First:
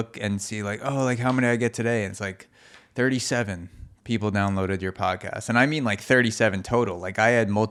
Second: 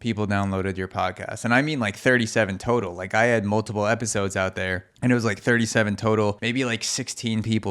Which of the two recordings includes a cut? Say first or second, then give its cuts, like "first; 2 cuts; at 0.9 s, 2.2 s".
second; 2 cuts; at 4.8 s, 6.4 s